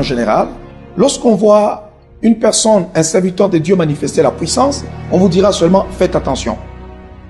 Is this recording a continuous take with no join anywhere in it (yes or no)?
yes